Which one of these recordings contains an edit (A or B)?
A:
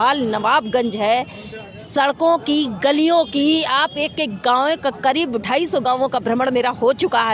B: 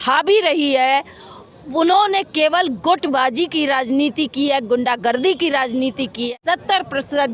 B